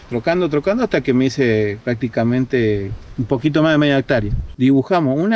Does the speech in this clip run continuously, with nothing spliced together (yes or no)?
no